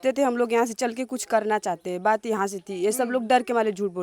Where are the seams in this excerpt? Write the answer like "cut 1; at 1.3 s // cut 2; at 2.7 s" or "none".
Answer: none